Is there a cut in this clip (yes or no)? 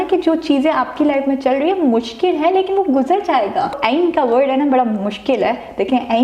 yes